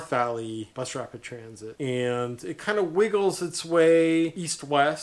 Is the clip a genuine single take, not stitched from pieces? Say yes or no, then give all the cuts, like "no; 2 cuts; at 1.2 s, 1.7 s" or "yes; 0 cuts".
yes; 0 cuts